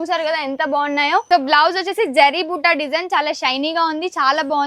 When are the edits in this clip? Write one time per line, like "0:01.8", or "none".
0:01.2